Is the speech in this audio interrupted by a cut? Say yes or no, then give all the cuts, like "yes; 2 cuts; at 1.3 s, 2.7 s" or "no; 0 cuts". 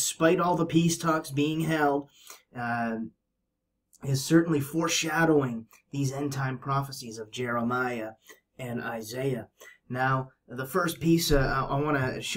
yes; 1 cut; at 6.2 s